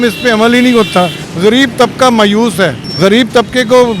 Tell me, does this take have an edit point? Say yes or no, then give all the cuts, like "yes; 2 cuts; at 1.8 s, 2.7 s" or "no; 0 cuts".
yes; 2 cuts; at 1.2 s, 2.8 s